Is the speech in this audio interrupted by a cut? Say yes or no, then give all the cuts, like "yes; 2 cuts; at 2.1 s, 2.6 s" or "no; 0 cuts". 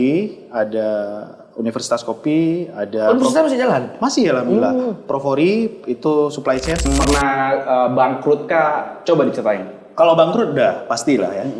yes; 1 cut; at 6.9 s